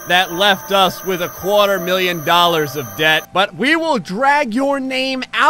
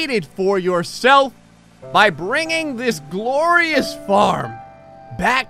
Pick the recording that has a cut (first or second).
first